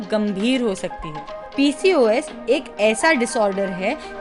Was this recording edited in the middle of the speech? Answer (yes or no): yes